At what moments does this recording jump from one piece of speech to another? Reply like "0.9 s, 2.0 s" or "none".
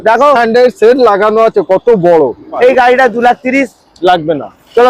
2.5 s